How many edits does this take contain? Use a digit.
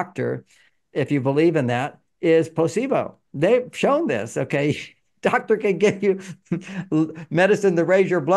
0